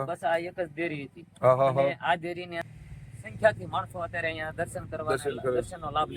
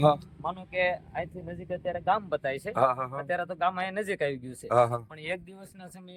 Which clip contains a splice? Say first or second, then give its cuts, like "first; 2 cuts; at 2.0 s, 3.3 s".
first; 1 cut; at 2.6 s